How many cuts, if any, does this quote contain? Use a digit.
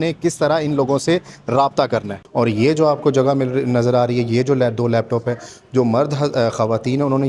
1